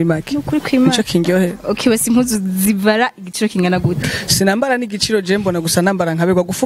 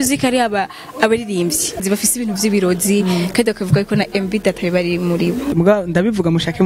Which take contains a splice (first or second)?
second